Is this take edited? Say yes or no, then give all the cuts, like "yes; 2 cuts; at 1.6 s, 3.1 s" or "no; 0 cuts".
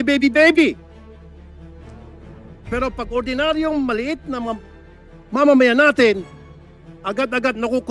yes; 2 cuts; at 0.8 s, 2.7 s